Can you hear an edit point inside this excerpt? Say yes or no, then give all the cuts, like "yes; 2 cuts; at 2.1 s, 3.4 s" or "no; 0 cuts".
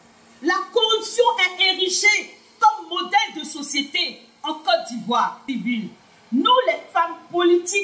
yes; 1 cut; at 5.5 s